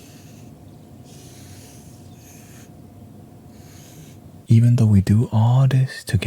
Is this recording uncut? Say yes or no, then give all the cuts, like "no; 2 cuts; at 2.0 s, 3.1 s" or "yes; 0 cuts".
no; 1 cut; at 4.4 s